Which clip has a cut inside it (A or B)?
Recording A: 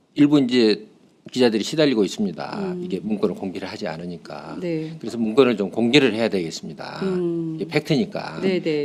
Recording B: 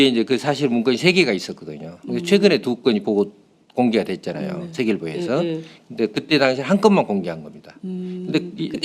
B